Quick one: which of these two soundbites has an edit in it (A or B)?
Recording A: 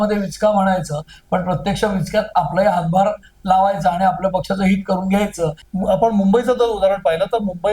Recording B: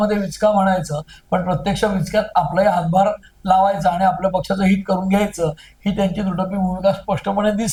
A